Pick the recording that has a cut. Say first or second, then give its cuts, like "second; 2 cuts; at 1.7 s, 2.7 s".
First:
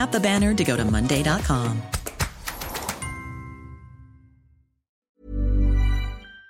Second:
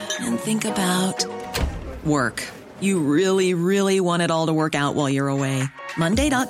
first; 1 cut; at 5.2 s